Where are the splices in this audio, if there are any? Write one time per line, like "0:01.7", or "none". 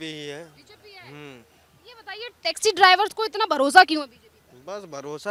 none